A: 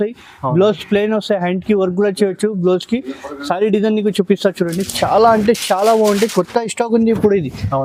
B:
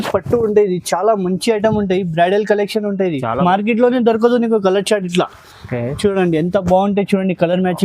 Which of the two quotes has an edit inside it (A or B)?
B